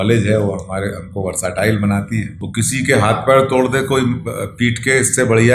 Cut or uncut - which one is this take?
cut